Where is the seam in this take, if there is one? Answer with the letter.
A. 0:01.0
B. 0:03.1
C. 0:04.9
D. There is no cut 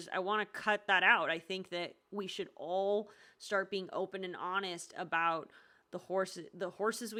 D